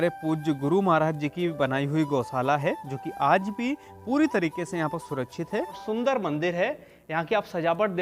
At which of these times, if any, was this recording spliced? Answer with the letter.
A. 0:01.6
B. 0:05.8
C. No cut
B